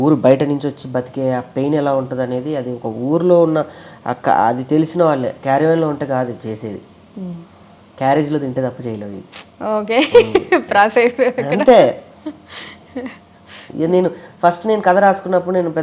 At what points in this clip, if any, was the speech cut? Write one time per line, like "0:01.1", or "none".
none